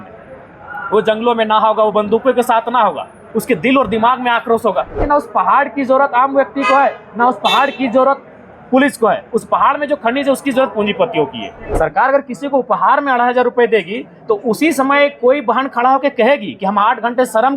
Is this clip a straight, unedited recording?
no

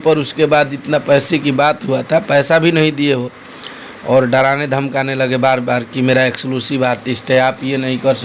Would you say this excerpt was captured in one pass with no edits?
yes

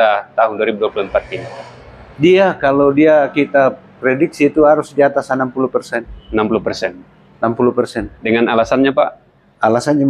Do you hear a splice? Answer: yes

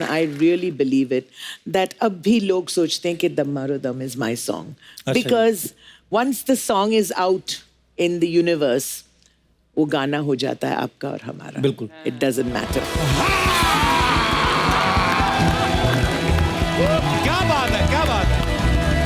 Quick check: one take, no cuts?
no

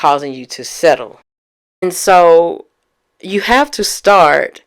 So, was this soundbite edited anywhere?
yes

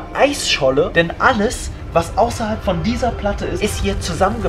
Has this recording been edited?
yes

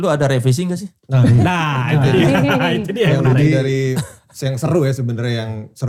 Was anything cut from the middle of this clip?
no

